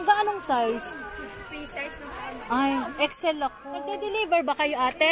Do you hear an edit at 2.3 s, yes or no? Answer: no